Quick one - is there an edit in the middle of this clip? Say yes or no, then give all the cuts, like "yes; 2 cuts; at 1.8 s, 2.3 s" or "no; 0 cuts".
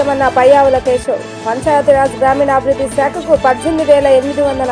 no; 0 cuts